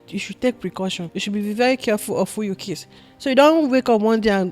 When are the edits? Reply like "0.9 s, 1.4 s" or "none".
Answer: 1.1 s